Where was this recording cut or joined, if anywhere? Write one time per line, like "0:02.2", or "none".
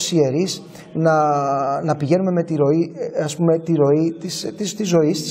none